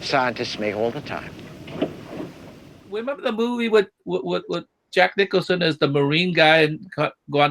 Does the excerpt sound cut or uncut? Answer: cut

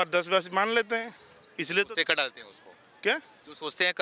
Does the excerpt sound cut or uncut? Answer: uncut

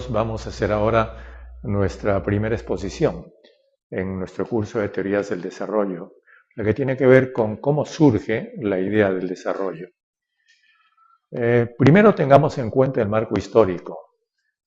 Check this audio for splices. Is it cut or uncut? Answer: uncut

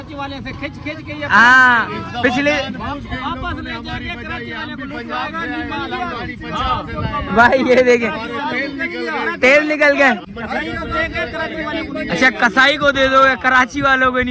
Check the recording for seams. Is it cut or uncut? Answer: cut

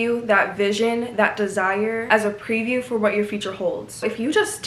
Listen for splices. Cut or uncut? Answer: uncut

